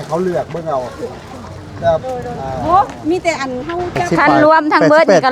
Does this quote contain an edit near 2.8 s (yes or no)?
no